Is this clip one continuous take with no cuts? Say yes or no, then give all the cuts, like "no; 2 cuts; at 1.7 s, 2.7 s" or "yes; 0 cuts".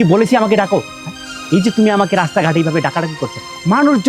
yes; 0 cuts